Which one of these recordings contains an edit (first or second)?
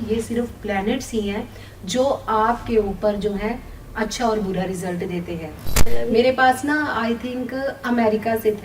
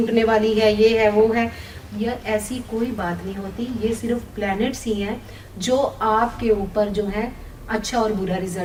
first